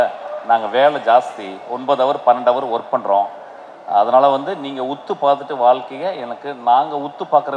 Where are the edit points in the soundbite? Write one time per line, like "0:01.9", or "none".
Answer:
none